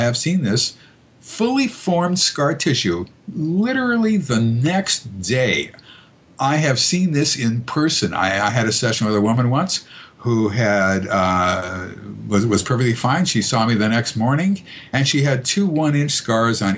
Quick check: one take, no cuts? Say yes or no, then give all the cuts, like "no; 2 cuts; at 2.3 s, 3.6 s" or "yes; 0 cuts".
yes; 0 cuts